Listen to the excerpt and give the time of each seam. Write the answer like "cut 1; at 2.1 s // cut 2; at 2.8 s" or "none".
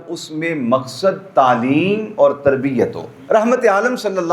cut 1; at 3.2 s